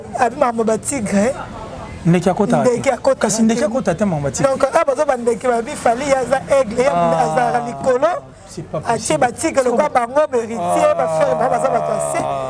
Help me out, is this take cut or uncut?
uncut